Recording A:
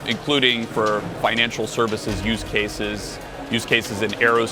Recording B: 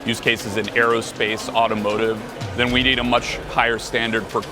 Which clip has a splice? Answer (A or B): B